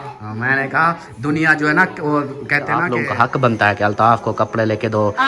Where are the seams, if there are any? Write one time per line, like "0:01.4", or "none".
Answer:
0:02.9